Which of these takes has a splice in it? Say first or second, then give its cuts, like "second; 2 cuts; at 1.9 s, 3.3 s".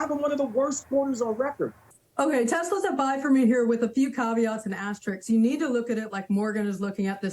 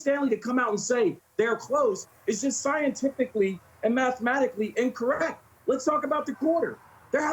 first; 1 cut; at 1.8 s